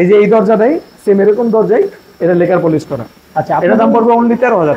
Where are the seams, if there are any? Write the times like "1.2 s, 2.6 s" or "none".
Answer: none